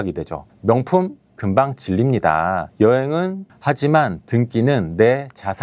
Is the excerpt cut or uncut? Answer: cut